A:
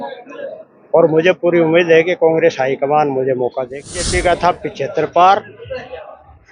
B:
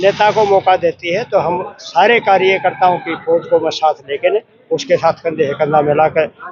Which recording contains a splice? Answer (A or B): A